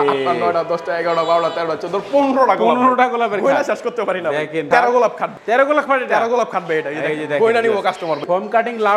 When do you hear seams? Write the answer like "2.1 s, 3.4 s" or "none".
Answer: 4.7 s, 5.3 s, 8.2 s